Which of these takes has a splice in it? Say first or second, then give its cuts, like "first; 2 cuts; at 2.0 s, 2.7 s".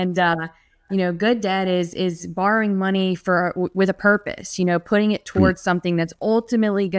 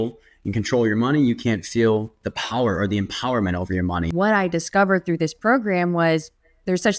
second; 1 cut; at 4.1 s